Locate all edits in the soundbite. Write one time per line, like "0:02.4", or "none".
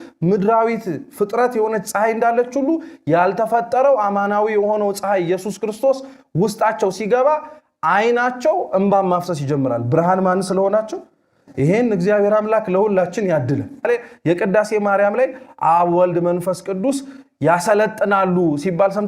0:13.9